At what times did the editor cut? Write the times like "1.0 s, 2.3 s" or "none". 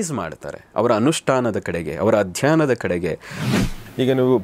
3.5 s